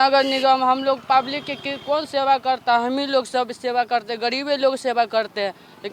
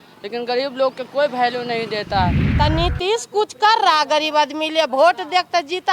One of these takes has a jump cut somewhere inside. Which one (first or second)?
second